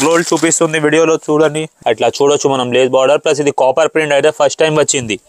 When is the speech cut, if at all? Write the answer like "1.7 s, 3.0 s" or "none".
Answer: 1.7 s